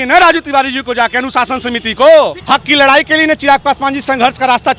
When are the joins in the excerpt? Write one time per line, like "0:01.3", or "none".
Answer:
0:02.4